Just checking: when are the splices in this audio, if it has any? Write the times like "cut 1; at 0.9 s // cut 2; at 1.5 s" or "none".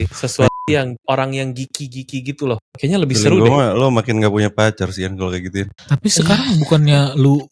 cut 1; at 2.7 s